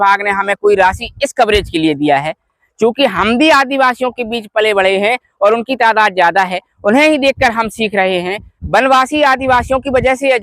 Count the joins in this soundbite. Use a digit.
0